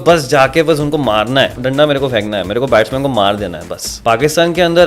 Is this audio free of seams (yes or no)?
no